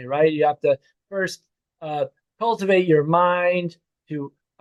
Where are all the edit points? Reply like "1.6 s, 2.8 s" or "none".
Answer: none